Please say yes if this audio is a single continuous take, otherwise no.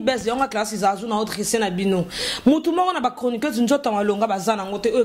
yes